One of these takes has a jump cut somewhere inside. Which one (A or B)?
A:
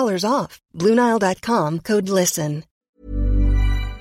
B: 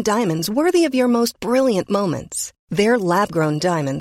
A